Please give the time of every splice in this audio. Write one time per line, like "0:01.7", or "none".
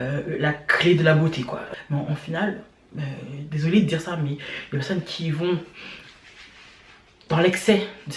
0:01.7